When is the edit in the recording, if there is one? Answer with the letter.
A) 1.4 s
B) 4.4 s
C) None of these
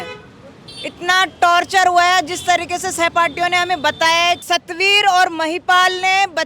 B